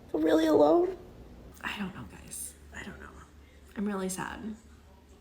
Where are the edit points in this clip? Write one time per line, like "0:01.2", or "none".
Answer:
0:01.4